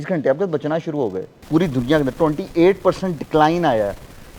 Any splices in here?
yes; 1 cut; at 1.3 s

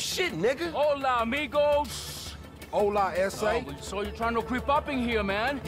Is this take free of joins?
yes; 0 cuts

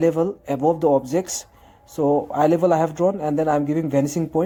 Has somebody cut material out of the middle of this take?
no; 0 cuts

